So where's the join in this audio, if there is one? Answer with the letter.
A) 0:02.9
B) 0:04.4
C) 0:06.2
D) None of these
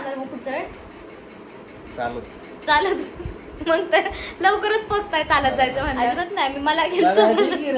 C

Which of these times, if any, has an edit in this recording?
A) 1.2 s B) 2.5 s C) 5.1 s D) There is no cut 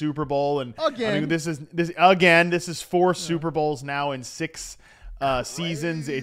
D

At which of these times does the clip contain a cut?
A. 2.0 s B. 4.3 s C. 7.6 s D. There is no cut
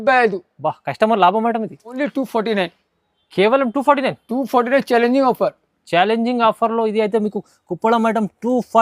A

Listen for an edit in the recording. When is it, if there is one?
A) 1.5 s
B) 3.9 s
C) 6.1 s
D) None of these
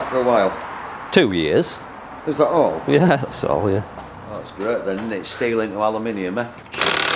D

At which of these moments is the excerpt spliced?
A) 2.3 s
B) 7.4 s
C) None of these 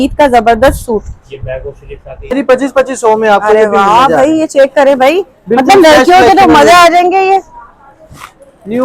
A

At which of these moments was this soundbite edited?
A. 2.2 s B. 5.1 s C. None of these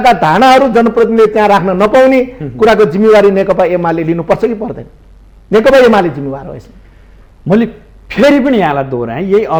C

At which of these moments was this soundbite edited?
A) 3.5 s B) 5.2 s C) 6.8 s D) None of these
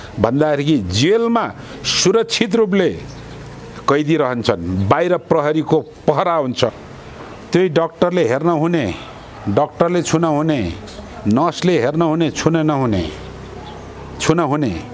C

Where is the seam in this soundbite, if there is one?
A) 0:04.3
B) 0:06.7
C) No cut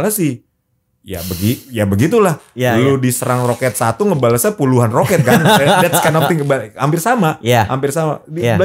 C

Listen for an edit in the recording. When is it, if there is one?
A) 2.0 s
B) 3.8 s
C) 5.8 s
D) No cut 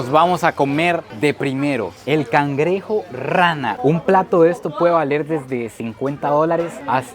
B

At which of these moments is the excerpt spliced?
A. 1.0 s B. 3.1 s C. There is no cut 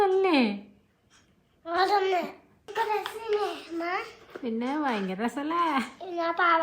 B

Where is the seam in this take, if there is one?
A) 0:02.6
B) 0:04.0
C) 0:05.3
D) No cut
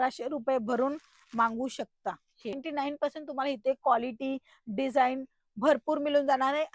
A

